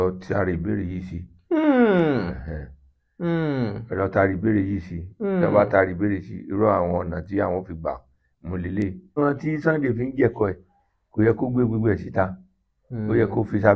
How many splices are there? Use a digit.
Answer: 1